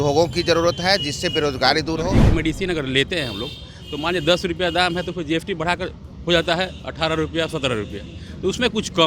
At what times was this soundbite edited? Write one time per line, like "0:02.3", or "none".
0:02.2